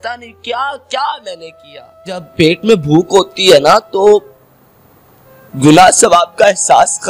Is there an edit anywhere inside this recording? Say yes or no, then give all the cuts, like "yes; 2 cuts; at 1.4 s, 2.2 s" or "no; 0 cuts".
yes; 1 cut; at 2.2 s